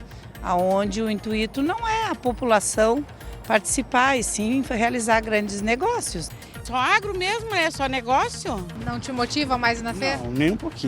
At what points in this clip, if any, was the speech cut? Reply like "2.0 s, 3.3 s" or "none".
6.5 s, 8.7 s